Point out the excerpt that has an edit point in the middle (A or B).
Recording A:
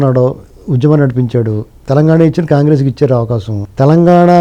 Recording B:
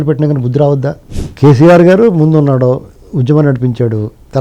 B